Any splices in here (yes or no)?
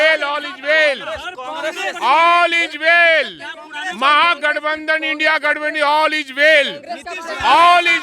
no